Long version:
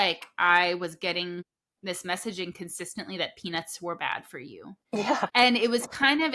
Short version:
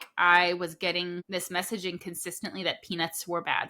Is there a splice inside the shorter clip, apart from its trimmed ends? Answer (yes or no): yes